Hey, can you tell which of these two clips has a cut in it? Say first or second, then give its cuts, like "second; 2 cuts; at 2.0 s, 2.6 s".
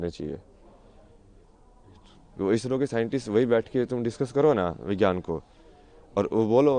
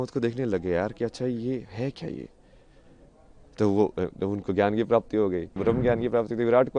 second; 1 cut; at 5.5 s